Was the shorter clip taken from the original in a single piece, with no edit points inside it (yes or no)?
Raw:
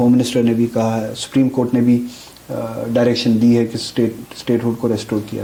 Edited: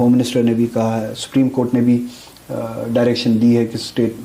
yes